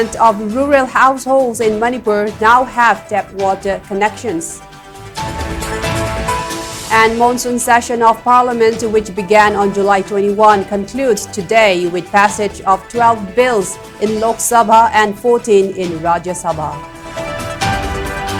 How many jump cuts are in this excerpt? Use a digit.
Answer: 0